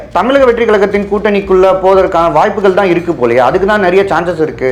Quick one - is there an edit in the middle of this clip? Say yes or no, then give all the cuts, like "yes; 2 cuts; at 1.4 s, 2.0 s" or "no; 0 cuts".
no; 0 cuts